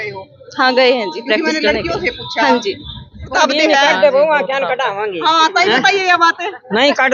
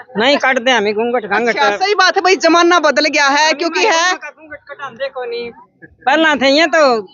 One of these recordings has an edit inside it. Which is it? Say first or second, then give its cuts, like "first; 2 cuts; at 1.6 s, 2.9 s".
first; 1 cut; at 3.3 s